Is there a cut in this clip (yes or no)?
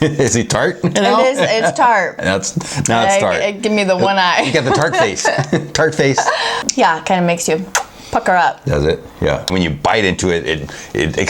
yes